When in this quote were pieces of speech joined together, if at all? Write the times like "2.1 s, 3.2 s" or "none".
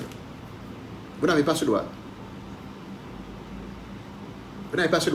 none